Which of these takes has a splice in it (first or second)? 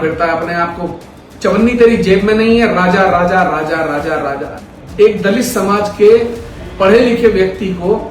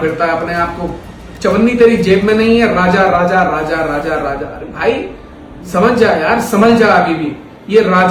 first